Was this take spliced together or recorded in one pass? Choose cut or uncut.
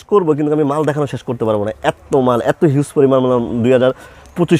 uncut